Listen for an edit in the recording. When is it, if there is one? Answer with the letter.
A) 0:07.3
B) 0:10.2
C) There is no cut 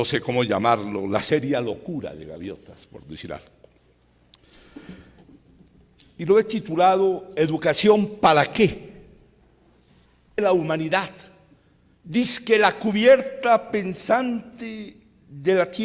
C